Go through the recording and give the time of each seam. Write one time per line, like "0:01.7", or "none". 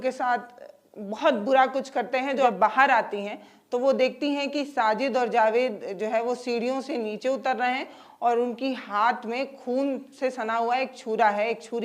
0:02.5